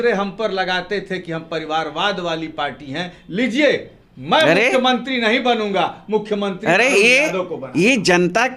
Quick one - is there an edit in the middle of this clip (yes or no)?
no